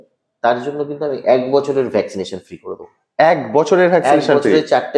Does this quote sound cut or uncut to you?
uncut